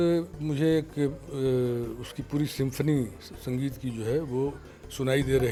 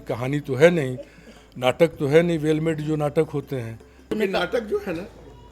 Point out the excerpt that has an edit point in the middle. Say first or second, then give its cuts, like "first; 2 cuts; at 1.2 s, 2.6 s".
second; 1 cut; at 4.1 s